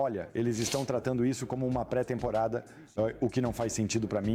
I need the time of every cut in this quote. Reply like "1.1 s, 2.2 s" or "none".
none